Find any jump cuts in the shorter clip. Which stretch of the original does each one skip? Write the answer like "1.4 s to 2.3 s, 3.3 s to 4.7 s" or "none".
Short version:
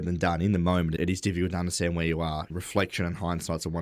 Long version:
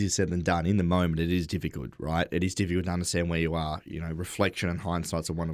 1.2 s to 2.3 s, 3.9 s to 4.2 s